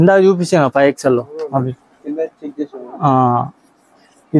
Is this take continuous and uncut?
yes; 0 cuts

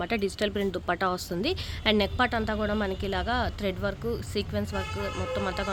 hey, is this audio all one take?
yes; 0 cuts

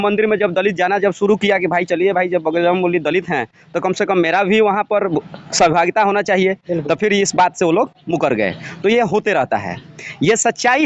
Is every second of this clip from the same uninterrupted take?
yes; 0 cuts

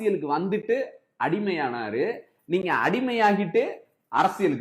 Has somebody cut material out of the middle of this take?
no; 0 cuts

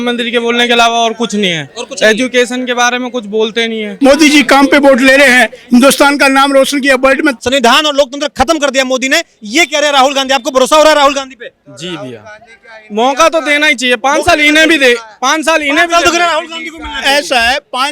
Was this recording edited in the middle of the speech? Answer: yes; 2 cuts; at 3.9 s, 7.4 s

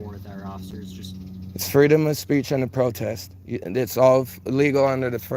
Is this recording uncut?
yes; 0 cuts

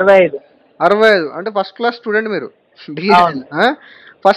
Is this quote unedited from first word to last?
yes; 0 cuts

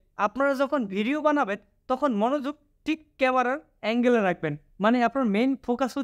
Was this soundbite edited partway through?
no; 0 cuts

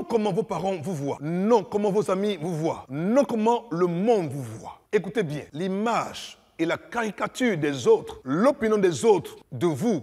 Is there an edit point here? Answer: yes; 3 cuts; at 1.2 s, 2.9 s, 5.4 s

